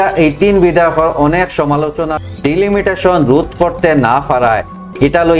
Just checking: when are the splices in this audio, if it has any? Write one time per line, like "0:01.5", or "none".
0:02.1